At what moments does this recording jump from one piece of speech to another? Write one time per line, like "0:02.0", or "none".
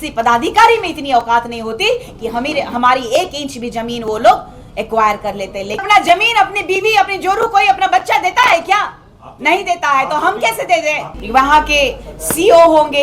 0:05.7
0:11.2